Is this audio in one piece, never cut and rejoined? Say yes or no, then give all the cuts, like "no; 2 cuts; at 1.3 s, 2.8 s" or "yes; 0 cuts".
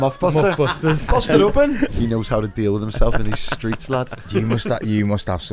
no; 1 cut; at 1.9 s